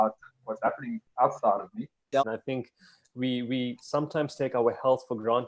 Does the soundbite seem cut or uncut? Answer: cut